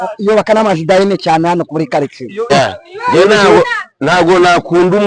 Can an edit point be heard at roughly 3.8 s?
no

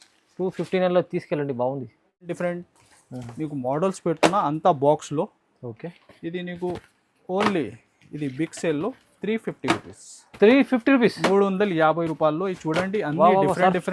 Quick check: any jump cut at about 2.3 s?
yes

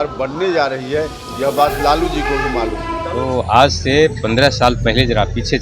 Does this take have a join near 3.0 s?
yes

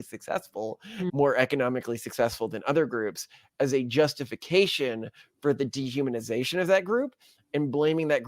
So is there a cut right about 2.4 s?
no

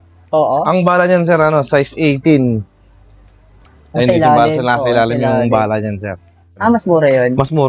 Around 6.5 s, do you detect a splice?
yes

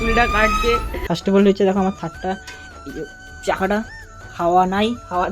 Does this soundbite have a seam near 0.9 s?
yes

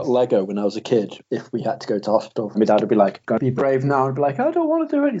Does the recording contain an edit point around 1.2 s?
yes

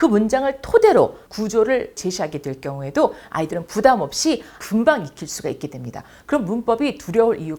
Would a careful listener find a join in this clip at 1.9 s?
yes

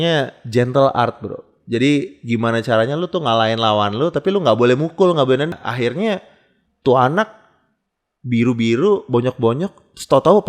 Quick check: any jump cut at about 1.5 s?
no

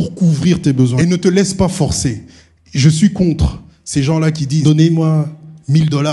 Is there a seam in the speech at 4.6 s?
yes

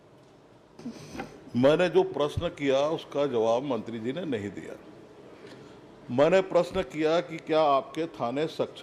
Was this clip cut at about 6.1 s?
no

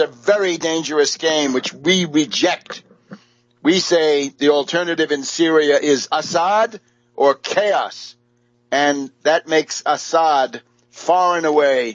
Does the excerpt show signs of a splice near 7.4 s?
yes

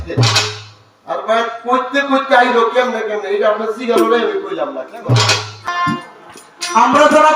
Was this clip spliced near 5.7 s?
yes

